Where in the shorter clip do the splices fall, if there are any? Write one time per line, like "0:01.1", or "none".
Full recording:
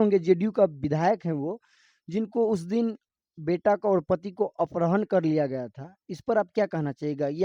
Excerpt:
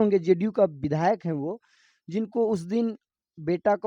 none